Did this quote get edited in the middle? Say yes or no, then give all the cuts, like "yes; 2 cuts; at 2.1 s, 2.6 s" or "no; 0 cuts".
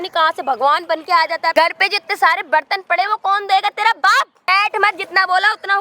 yes; 2 cuts; at 1.5 s, 4.5 s